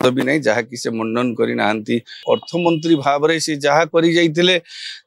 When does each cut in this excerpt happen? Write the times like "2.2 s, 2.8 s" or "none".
2.1 s